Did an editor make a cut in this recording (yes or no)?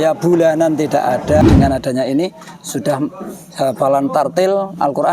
yes